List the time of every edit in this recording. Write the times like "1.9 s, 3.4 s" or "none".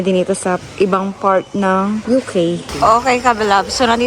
2.7 s